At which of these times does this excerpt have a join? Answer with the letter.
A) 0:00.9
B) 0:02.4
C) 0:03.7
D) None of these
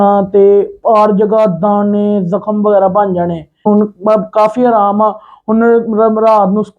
C